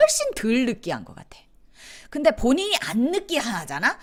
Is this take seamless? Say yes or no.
yes